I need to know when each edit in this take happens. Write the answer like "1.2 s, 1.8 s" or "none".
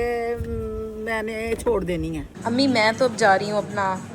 2.3 s